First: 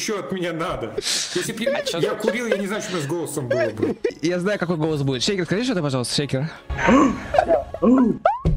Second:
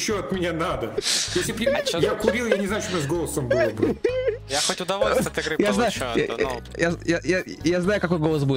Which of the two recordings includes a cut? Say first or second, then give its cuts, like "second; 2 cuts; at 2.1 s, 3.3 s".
first; 2 cuts; at 4.1 s, 6.6 s